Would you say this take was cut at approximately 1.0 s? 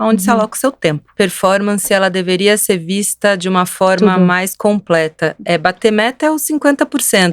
yes; 1 cut; at 1.0 s

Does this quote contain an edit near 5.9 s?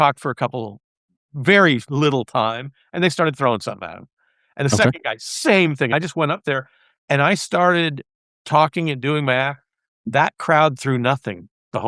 yes; 1 cut; at 5.9 s

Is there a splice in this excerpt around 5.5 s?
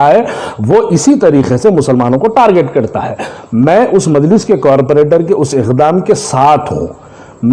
no; 0 cuts

